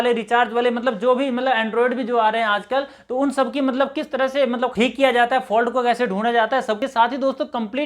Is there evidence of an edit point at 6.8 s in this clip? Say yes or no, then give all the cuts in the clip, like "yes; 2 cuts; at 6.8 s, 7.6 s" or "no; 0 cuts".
yes; 2 cuts; at 4.7 s, 6.8 s